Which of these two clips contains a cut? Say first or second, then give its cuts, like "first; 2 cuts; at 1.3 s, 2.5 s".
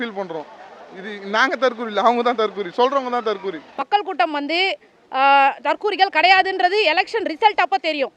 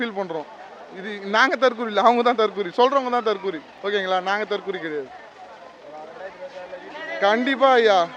first; 1 cut; at 3.6 s